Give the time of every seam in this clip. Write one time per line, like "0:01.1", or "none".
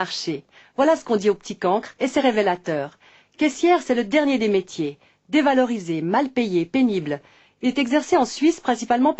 none